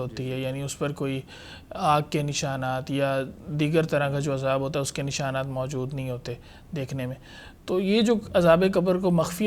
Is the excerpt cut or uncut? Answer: uncut